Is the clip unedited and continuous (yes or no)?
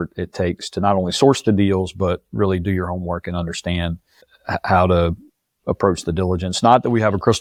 yes